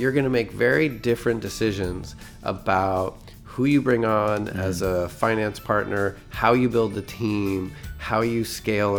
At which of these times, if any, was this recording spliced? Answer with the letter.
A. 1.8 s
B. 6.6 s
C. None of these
C